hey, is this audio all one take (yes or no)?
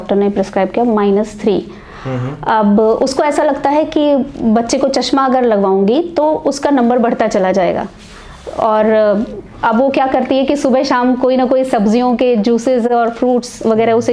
yes